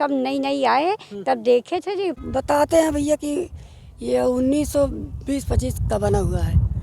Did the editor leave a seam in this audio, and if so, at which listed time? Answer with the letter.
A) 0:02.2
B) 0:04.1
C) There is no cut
A